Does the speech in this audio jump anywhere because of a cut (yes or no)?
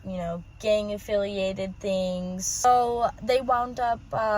yes